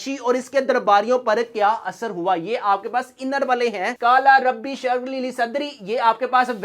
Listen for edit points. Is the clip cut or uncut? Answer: cut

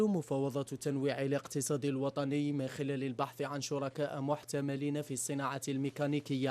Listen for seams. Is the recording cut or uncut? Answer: uncut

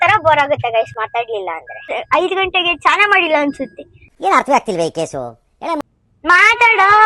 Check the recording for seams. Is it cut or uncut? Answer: cut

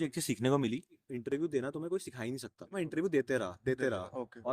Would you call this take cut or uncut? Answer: cut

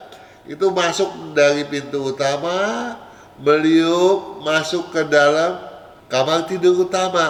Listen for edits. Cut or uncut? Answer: uncut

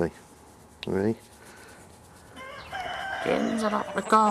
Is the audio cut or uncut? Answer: cut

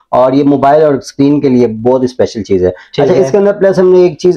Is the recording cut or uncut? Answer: uncut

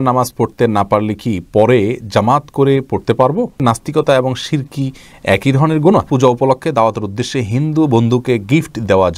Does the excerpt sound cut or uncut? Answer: cut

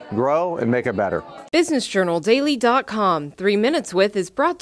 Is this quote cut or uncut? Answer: cut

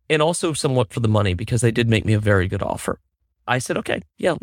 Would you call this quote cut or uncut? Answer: uncut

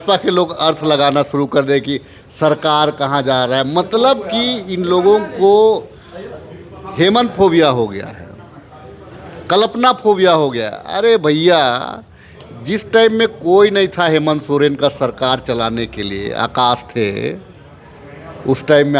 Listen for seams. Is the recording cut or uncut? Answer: uncut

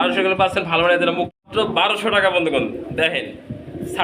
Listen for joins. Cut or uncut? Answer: cut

